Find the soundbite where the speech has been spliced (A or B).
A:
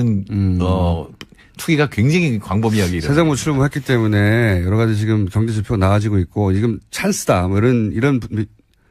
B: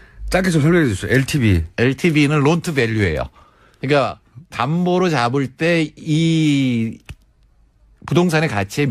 B